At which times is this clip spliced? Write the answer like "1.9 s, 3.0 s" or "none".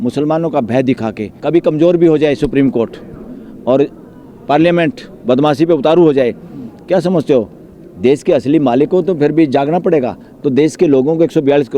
1.3 s